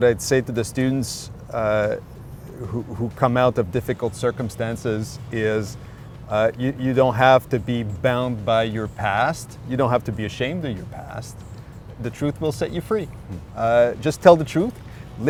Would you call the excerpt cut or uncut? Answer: uncut